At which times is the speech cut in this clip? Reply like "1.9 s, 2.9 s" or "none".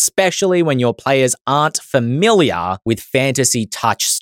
2.8 s